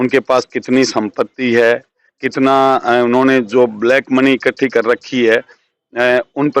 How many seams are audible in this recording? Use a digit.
0